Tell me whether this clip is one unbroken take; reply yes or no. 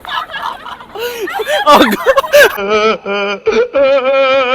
no